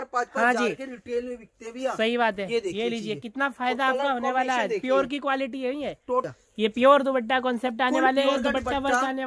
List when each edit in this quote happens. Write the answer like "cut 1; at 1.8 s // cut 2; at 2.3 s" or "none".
cut 1; at 6.3 s